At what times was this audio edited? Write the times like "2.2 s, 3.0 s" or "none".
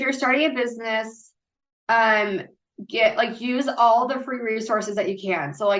none